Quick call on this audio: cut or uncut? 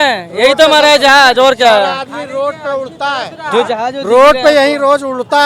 uncut